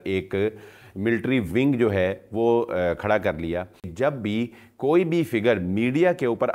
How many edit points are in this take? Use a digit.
1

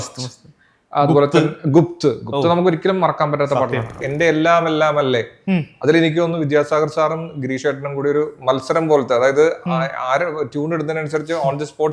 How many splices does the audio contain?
1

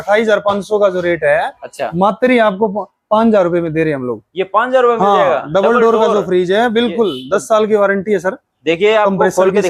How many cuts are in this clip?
0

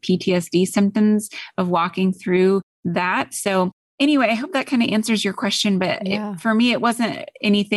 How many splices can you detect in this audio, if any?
1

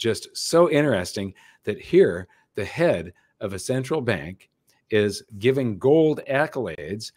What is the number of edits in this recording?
2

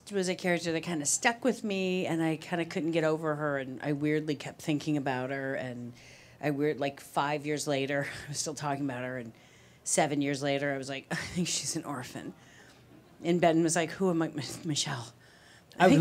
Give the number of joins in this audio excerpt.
1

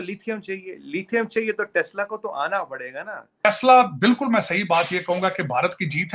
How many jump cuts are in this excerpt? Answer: 1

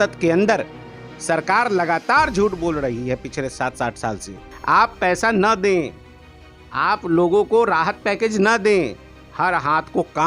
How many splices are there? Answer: 1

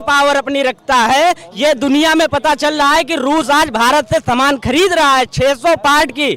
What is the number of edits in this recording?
0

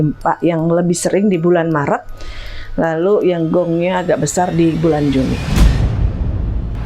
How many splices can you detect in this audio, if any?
1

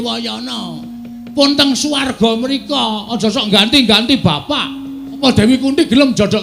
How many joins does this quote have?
1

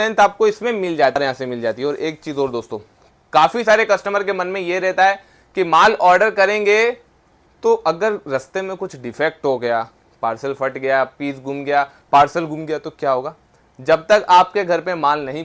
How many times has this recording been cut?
1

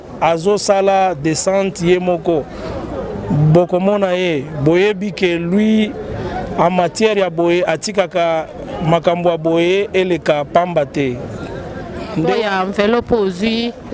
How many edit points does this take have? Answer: 1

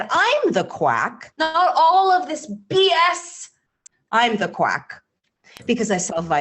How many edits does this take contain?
1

